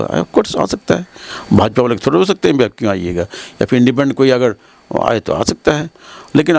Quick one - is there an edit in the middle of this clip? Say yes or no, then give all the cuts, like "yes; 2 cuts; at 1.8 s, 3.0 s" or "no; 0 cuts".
no; 0 cuts